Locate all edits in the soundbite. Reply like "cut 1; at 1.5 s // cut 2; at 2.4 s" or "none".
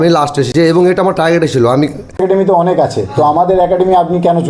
cut 1; at 2.2 s